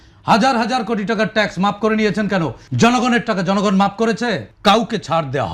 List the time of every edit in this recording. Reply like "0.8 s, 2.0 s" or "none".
2.6 s, 4.5 s

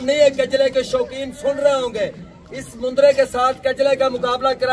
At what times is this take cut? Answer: none

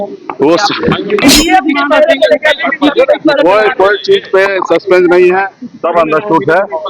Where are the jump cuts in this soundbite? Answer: 1.3 s

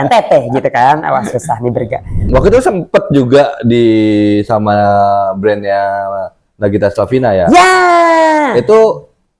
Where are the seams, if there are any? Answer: 2.2 s

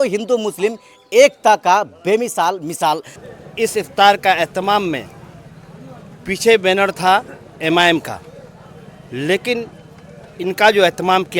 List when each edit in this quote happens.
3.2 s

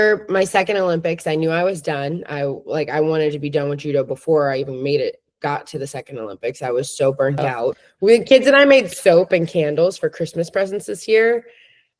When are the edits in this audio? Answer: 7.9 s

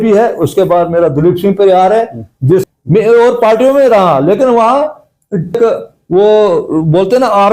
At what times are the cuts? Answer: 2.6 s, 5.6 s

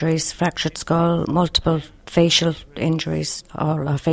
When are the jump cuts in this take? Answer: 2.7 s

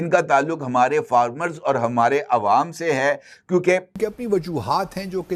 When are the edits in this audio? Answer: 4.0 s

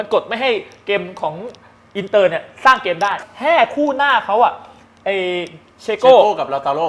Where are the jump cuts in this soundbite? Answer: 3.2 s

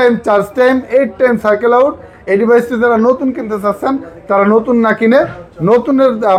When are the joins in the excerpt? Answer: none

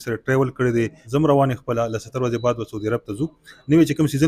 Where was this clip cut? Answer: 1.0 s

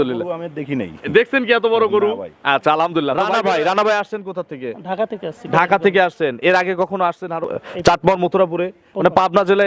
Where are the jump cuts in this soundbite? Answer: 3.2 s, 7.5 s

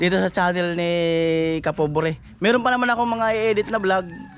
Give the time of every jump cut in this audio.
none

